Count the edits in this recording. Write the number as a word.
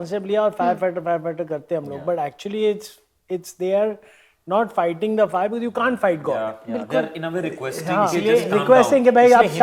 zero